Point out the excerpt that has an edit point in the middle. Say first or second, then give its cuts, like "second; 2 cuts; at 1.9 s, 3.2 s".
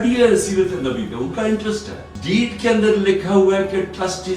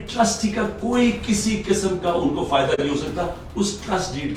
first; 1 cut; at 2.1 s